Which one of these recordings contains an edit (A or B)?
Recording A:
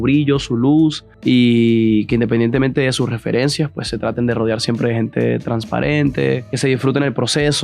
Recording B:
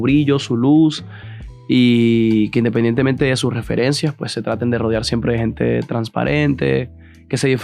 A